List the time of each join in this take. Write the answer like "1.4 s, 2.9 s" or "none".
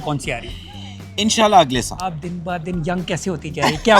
2.1 s